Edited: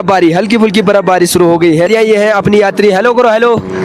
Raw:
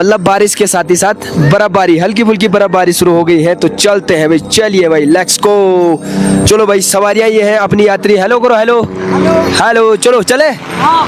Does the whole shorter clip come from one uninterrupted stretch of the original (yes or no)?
no